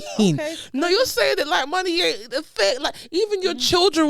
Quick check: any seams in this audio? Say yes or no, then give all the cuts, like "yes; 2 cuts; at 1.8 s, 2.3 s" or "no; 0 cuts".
no; 0 cuts